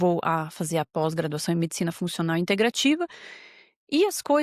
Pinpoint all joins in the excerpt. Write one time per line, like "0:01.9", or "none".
none